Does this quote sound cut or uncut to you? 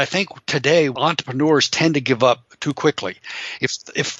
cut